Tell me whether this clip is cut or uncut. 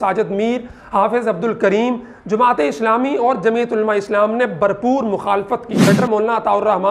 cut